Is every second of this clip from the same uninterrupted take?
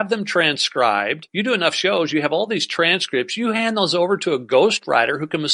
no; 1 cut; at 1.2 s

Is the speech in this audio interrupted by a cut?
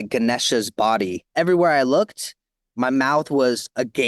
yes; 1 cut; at 1.3 s

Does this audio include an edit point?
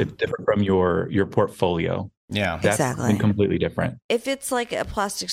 yes; 1 cut; at 4.0 s

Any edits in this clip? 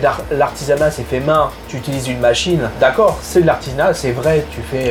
no; 0 cuts

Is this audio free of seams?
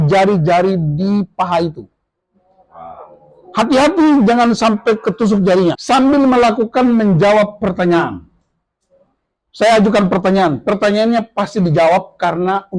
no; 1 cut; at 5.8 s

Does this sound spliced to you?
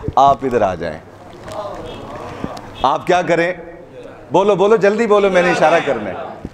no; 0 cuts

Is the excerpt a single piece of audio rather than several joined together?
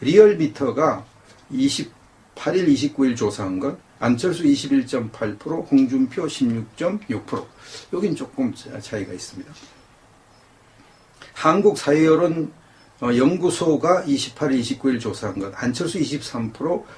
yes; 0 cuts

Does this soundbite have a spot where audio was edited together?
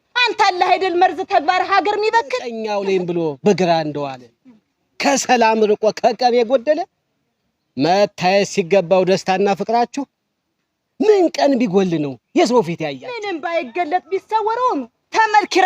yes; 2 cuts; at 2.6 s, 13.2 s

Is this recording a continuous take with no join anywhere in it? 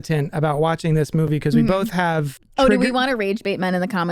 no; 1 cut; at 2.4 s

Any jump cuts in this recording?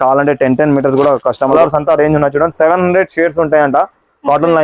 yes; 1 cut; at 1.5 s

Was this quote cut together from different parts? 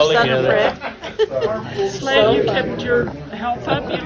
no; 0 cuts

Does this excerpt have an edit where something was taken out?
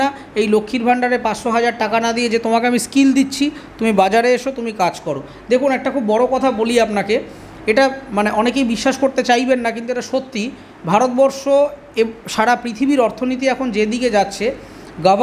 no; 0 cuts

